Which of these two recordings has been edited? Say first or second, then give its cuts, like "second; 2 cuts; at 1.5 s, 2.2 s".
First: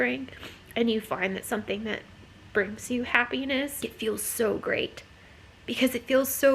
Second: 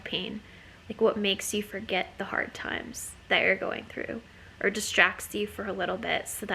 first; 1 cut; at 3.9 s